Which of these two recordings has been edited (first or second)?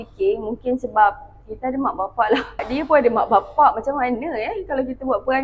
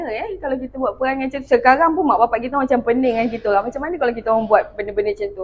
first